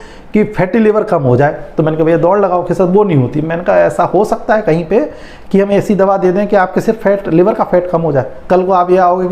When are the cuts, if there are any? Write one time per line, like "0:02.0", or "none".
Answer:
none